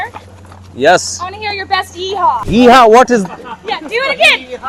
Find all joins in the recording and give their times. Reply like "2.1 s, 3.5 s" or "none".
none